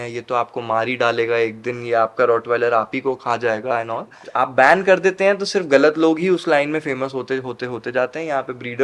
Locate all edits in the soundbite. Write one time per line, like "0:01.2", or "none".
0:04.2